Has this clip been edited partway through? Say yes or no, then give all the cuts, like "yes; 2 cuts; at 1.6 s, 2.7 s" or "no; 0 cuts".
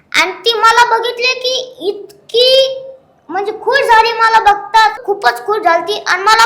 yes; 1 cut; at 5.0 s